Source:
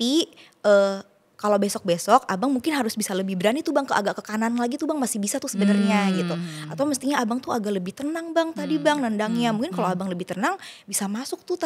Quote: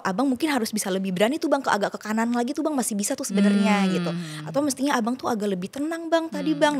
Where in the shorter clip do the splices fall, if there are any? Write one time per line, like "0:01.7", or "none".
none